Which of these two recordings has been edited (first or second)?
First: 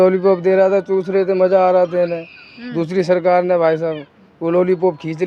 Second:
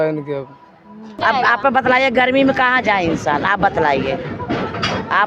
second